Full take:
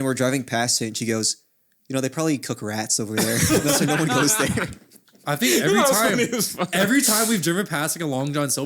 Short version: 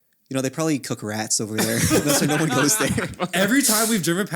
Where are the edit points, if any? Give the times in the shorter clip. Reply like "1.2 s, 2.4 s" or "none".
3.2 s